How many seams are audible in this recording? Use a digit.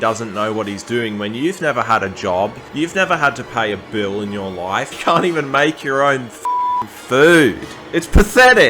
2